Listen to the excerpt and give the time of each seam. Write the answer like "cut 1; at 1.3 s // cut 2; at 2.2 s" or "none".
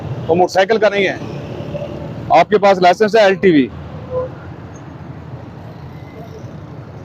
none